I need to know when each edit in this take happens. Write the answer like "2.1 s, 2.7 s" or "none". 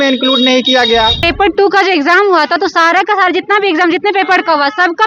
1.2 s